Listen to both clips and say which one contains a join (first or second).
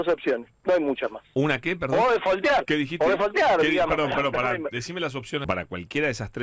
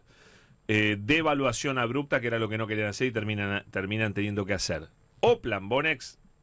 first